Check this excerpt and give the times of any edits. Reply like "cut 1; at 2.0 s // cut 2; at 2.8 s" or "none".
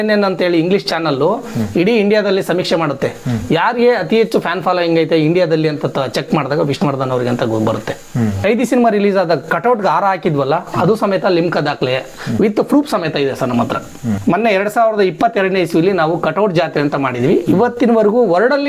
cut 1; at 8.4 s // cut 2; at 14.2 s